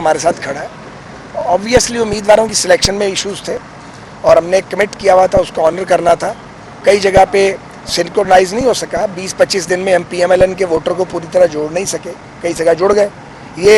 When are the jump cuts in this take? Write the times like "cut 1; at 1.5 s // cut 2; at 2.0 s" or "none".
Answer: none

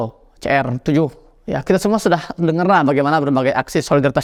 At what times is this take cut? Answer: none

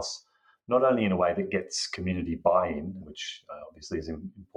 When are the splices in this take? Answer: cut 1; at 3.0 s

